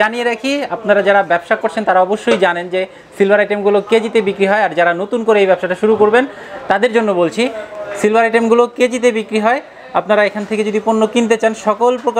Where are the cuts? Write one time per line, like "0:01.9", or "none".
none